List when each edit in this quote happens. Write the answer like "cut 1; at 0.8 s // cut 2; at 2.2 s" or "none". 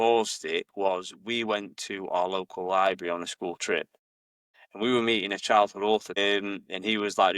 cut 1; at 6.1 s